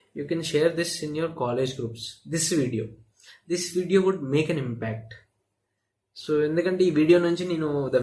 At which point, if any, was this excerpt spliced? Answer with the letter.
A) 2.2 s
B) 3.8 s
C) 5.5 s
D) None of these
D